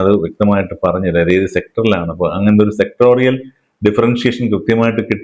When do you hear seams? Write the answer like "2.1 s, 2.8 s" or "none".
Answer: none